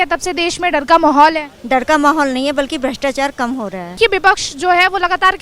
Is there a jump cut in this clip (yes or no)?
yes